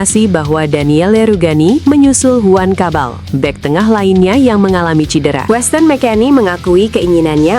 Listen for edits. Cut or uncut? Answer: cut